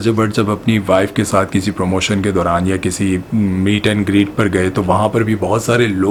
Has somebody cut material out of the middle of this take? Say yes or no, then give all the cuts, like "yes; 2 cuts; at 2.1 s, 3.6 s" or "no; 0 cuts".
no; 0 cuts